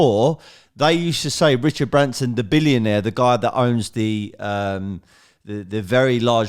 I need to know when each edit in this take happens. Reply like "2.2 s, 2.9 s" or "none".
none